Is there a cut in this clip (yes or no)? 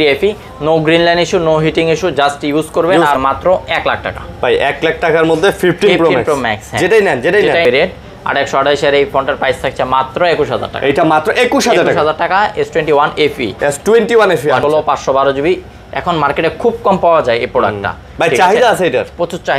yes